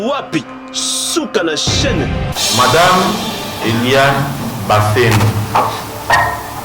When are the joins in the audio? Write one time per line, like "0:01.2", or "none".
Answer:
0:02.3